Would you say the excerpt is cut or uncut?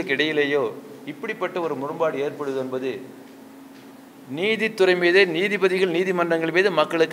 uncut